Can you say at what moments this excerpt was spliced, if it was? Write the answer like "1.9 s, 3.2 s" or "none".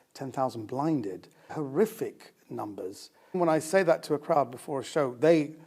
1.5 s, 3.4 s